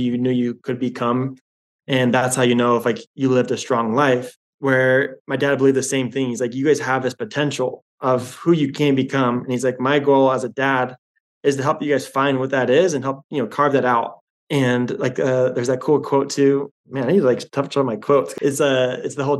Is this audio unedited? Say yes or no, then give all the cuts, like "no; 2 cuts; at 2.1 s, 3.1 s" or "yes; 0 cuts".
no; 2 cuts; at 16.8 s, 18.3 s